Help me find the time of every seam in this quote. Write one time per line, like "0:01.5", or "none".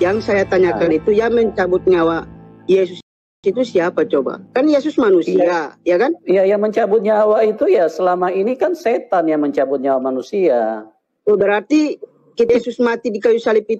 none